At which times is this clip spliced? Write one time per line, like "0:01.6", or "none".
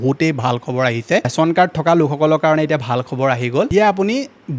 0:01.3
0:03.7